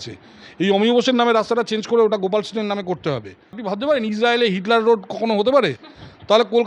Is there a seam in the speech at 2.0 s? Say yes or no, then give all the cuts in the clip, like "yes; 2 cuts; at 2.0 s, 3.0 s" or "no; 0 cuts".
no; 1 cut; at 3.6 s